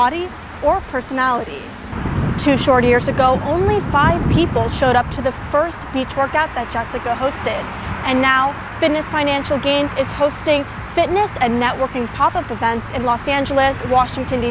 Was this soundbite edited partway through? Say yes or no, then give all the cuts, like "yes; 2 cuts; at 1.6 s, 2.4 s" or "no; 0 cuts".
yes; 1 cut; at 1.9 s